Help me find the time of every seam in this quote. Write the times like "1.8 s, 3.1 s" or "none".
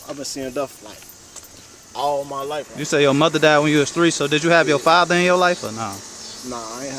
2.7 s